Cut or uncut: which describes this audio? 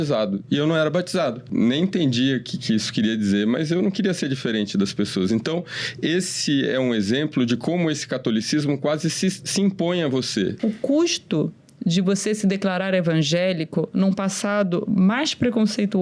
cut